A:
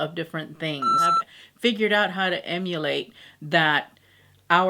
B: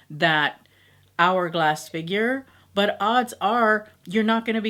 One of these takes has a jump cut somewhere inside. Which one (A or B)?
A